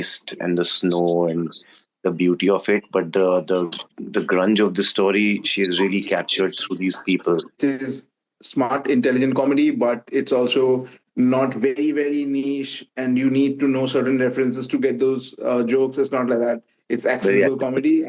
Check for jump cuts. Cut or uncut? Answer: cut